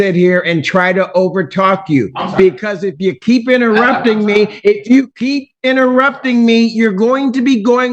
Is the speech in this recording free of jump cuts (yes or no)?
yes